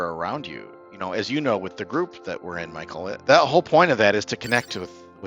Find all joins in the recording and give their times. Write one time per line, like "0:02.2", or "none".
0:03.2

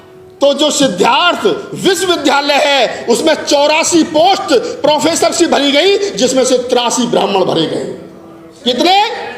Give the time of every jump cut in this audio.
none

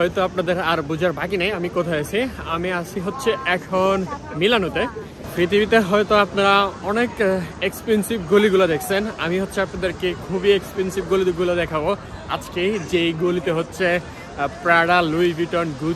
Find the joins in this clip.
0:05.1

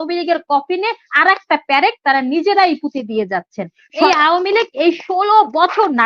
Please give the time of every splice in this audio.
0:04.1

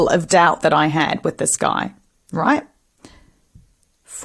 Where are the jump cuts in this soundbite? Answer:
none

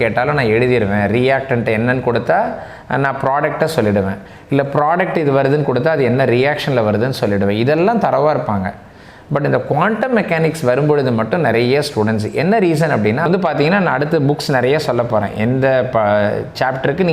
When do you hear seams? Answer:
0:13.3

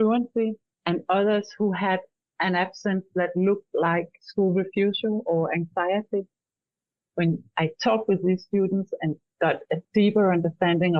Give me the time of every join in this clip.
none

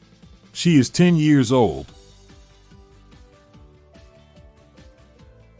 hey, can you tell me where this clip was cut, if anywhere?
0:01.9

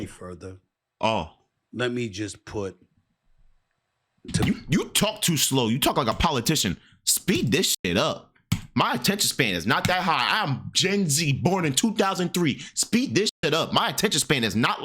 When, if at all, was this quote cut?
none

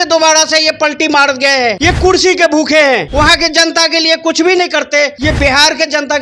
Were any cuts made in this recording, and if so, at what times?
0:01.8
0:03.1
0:05.1

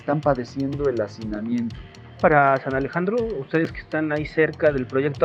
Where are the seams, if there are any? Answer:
0:02.2

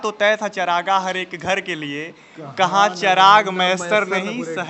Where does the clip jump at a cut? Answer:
none

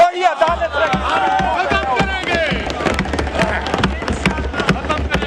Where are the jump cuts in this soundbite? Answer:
none

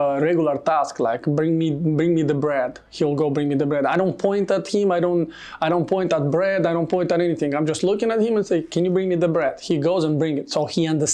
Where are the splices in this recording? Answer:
none

